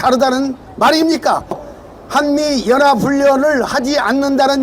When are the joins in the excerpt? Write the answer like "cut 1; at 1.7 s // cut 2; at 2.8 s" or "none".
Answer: cut 1; at 1.7 s